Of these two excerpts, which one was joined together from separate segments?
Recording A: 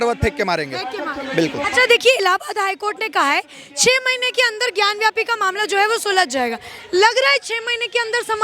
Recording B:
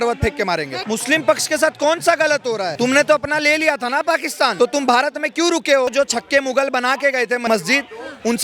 B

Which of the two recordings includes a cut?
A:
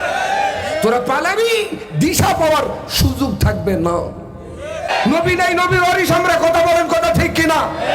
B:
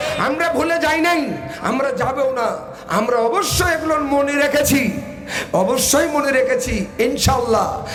A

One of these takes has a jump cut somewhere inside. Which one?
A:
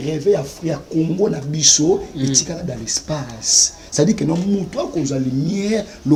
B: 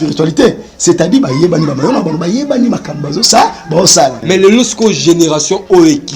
B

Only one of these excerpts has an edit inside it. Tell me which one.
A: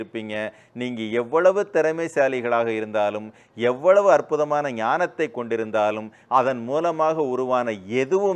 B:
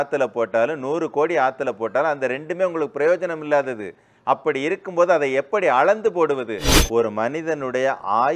B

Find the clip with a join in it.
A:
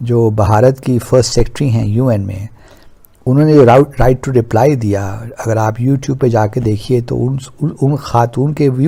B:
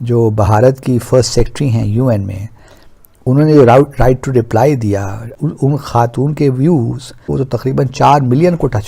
B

